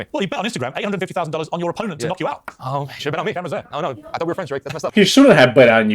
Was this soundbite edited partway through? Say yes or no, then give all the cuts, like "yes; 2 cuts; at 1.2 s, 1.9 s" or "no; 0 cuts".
yes; 2 cuts; at 2.4 s, 4.9 s